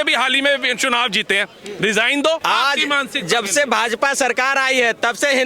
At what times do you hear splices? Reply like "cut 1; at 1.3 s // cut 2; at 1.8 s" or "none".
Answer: cut 1; at 2.4 s